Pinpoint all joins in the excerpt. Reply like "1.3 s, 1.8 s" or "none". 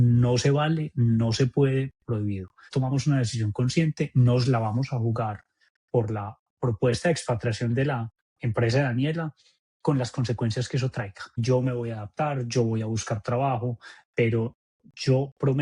2.7 s, 11.2 s

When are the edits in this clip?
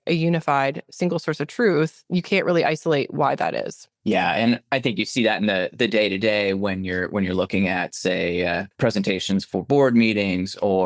2.0 s, 8.7 s

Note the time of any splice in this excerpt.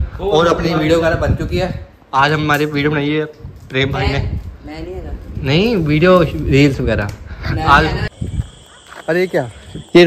8.1 s

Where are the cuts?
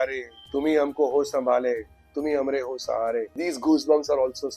3.3 s

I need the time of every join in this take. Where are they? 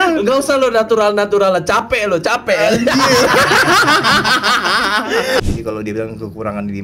5.5 s

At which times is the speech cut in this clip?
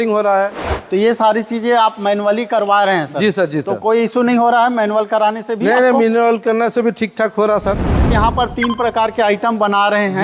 8.1 s

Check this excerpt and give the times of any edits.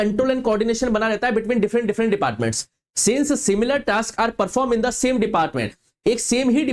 none

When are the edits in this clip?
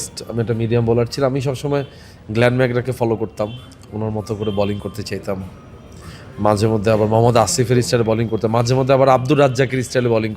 none

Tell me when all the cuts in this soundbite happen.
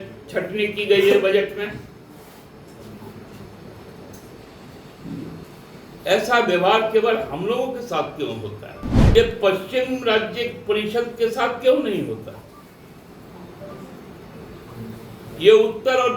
8.9 s

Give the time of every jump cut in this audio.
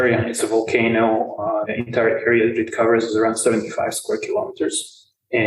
1.7 s

